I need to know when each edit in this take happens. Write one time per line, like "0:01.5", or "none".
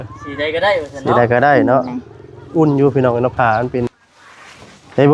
0:03.9